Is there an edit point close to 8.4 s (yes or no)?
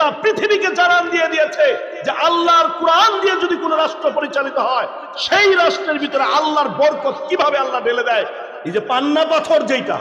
yes